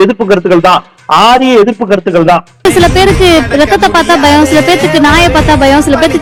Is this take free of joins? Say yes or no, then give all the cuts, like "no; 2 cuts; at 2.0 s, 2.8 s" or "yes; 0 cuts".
yes; 0 cuts